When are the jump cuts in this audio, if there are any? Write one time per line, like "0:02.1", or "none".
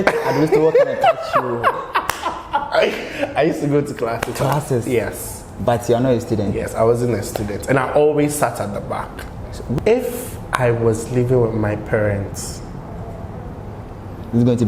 0:09.8

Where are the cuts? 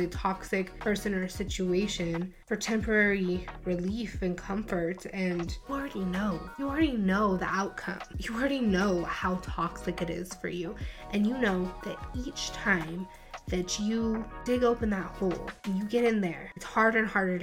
none

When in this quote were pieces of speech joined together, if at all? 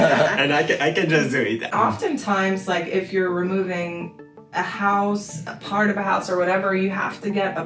0:01.7

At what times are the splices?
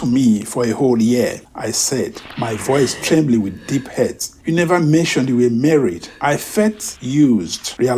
0:04.3
0:06.1
0:06.9

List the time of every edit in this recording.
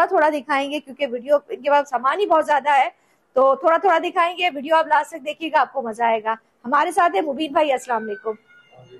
none

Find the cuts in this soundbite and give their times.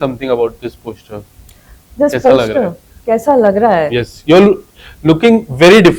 none

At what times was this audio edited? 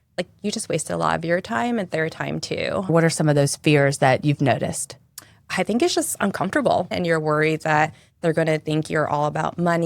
0:02.9
0:06.9

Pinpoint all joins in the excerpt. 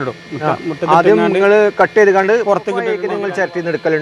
0:03.0

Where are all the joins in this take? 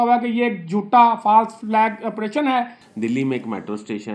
0:01.6
0:02.8

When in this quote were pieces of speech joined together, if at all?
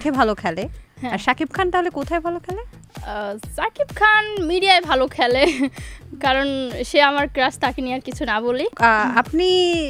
none

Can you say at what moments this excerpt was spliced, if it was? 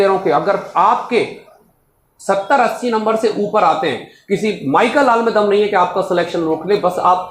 none

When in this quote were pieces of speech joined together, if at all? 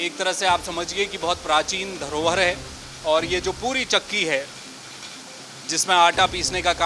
none

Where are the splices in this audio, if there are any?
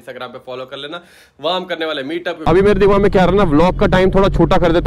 0:02.4

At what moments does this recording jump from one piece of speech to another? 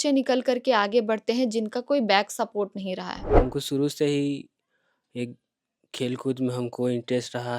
0:03.2

